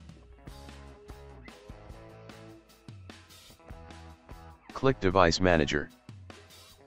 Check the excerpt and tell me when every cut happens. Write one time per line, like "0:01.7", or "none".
0:04.7
0:05.9